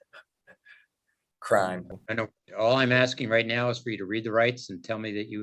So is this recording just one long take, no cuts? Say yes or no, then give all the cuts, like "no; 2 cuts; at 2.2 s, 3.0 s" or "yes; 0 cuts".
yes; 0 cuts